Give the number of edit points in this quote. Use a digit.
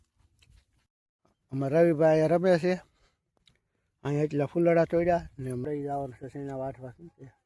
2